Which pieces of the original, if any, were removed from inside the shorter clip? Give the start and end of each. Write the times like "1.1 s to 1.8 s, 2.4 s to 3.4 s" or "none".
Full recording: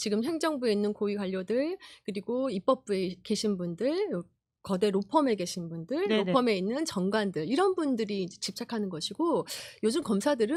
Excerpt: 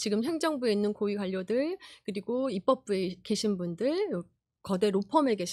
none